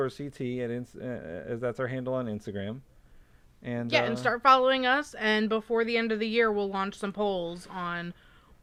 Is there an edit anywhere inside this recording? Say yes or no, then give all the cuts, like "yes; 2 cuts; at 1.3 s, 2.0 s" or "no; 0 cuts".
no; 0 cuts